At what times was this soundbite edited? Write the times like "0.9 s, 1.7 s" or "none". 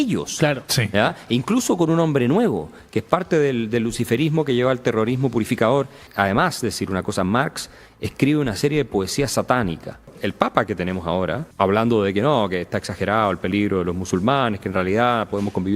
6.0 s, 10.2 s, 11.4 s